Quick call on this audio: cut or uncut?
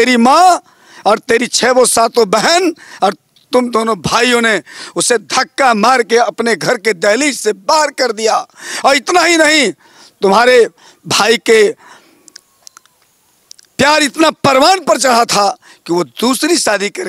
uncut